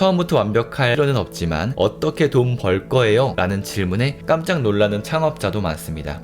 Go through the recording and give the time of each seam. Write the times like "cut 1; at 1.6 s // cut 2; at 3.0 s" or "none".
cut 1; at 0.9 s // cut 2; at 3.3 s